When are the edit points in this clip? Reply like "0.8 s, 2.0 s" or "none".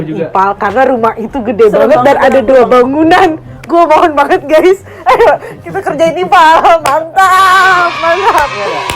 none

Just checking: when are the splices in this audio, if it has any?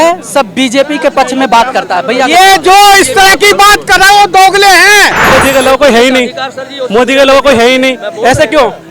5.3 s

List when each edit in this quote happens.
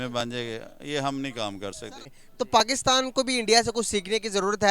2.2 s

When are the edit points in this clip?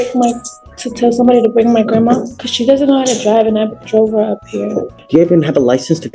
2.3 s, 5.0 s

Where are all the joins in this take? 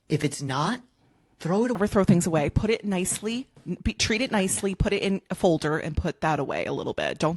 1.8 s

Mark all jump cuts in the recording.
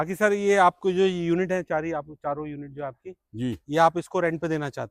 none

